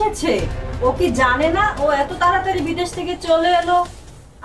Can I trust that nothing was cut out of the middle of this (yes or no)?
yes